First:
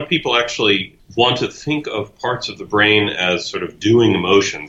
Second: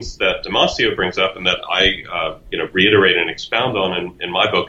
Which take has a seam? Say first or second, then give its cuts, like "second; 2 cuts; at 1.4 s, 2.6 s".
first; 1 cut; at 0.9 s